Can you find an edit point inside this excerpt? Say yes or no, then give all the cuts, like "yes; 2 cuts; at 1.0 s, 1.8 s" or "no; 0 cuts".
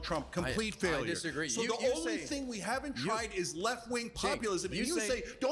no; 0 cuts